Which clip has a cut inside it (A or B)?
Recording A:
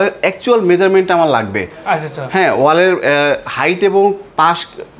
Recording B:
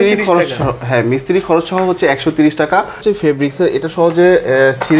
B